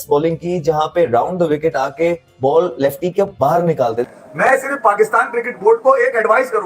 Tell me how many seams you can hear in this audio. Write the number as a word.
one